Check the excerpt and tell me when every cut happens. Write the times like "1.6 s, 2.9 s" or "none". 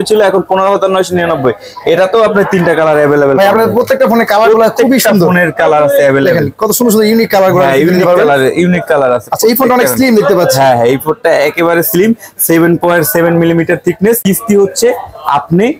14.2 s

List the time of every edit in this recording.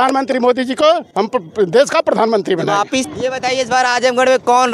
3.1 s

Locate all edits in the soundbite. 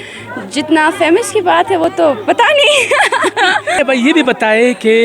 3.8 s

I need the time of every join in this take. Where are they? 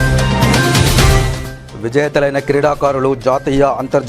1.4 s

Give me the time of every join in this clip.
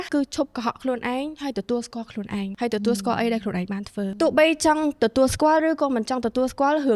4.1 s

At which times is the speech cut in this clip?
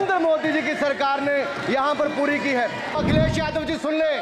3.0 s

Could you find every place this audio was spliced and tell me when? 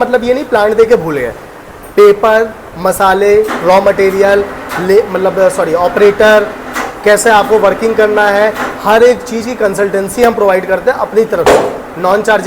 none

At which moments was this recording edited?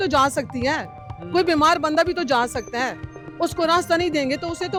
none

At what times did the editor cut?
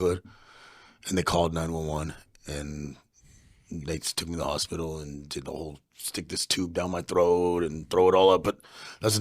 none

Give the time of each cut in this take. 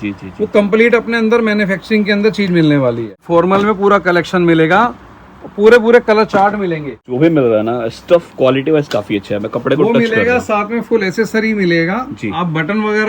3.2 s, 7.0 s

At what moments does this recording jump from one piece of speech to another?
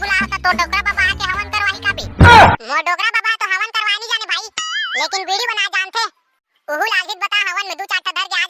2.0 s, 2.6 s

